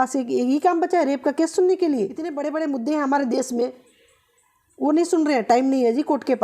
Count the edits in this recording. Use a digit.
1